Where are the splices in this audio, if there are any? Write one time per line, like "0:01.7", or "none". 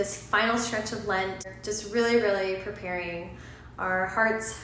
0:01.5

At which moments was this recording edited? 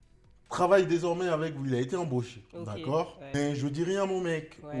0:03.2

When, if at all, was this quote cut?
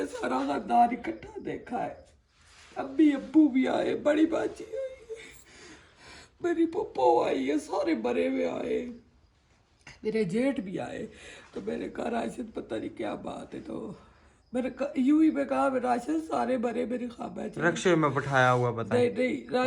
none

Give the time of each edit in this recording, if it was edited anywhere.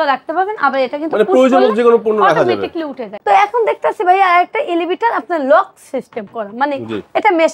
0:03.1

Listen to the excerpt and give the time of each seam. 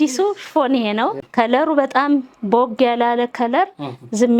0:01.1

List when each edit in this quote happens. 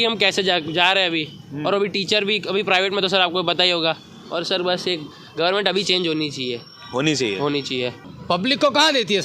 0:04.1
0:08.1

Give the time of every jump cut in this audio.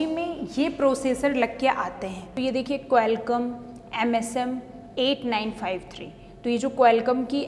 0:02.2

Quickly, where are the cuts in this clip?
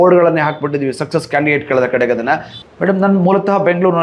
0:02.5

